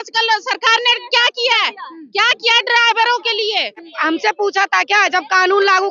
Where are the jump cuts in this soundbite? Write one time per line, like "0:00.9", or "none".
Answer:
0:03.9